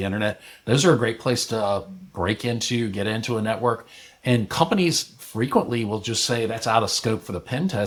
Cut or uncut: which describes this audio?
uncut